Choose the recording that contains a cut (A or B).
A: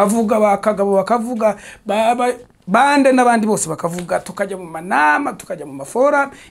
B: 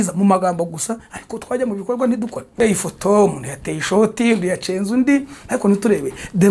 B